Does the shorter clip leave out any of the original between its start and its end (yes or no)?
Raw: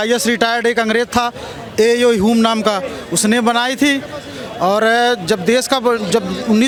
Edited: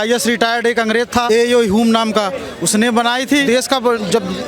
yes